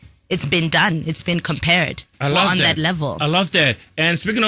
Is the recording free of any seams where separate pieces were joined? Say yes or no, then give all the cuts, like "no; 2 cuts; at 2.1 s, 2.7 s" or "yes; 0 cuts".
yes; 0 cuts